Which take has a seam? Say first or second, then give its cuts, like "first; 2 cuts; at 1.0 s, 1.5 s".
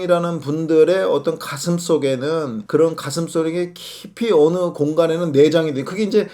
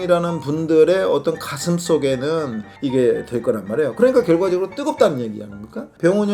second; 1 cut; at 2.6 s